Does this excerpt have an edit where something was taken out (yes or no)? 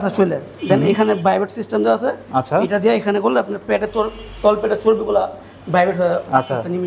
no